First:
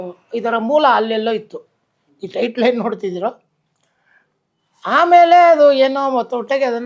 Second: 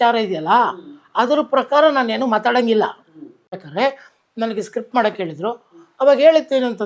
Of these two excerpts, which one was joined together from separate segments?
second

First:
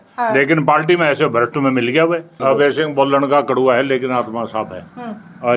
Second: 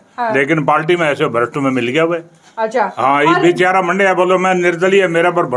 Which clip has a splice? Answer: first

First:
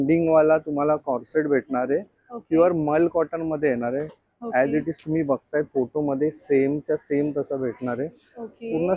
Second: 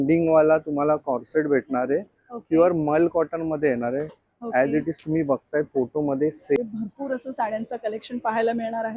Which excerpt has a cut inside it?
second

